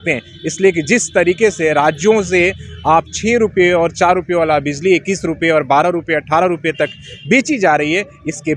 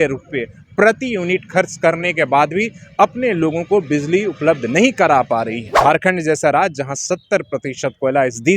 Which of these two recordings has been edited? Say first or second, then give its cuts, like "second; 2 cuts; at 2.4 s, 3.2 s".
second; 1 cut; at 5.7 s